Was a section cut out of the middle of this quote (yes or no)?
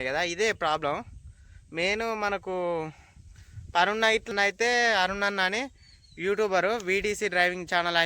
yes